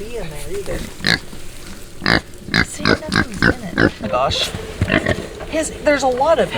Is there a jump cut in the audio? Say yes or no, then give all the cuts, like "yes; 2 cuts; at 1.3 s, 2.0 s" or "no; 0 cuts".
yes; 1 cut; at 4.0 s